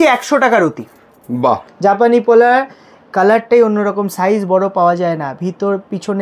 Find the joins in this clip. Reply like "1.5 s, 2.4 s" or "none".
1.7 s